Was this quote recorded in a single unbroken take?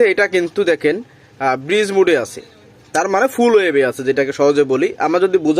yes; 0 cuts

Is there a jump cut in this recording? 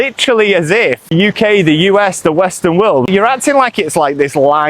yes; 2 cuts; at 1.1 s, 3.1 s

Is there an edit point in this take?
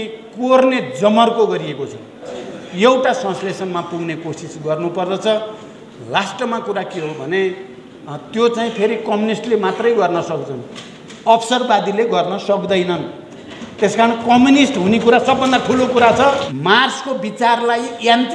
yes; 2 cuts; at 2.3 s, 16.5 s

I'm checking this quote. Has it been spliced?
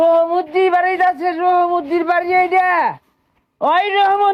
no; 0 cuts

